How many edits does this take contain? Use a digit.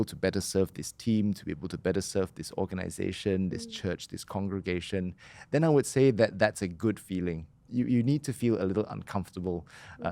1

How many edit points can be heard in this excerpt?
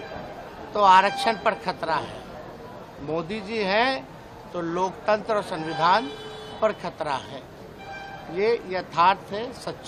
0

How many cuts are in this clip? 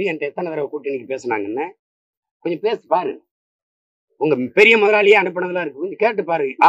0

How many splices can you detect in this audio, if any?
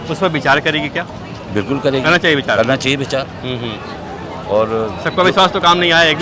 0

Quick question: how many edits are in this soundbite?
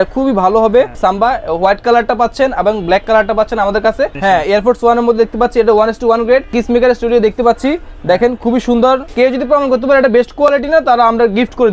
4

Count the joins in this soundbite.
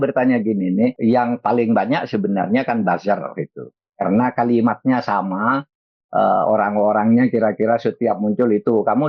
1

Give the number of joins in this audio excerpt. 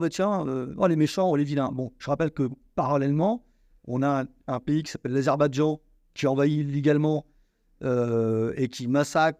0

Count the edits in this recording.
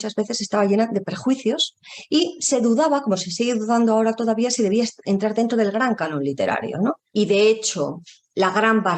1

